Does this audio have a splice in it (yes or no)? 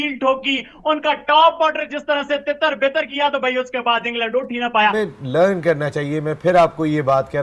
yes